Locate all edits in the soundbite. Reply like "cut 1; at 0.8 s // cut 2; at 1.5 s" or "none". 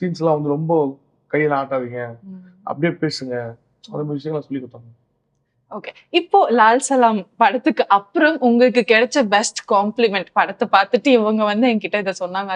none